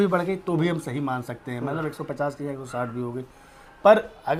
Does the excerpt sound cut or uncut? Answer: uncut